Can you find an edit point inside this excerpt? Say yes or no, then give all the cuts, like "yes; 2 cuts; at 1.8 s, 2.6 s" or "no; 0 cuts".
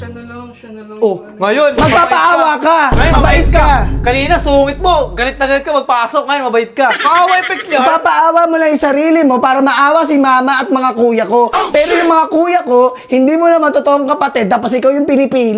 yes; 1 cut; at 7.0 s